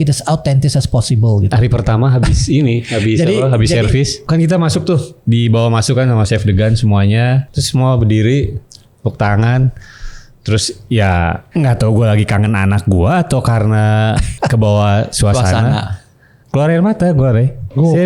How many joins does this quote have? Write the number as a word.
five